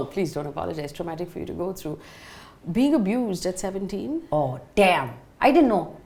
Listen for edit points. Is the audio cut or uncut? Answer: uncut